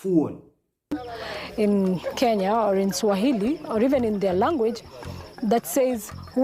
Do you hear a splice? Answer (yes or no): yes